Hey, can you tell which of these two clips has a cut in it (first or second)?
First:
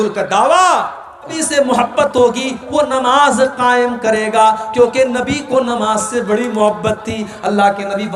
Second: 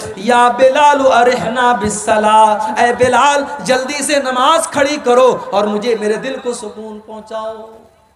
first